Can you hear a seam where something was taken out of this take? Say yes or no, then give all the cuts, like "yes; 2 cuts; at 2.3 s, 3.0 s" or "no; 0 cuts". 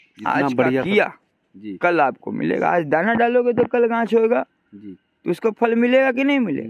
no; 0 cuts